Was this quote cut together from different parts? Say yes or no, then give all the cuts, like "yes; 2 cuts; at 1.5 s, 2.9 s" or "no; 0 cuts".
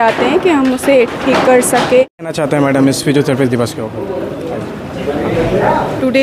no; 0 cuts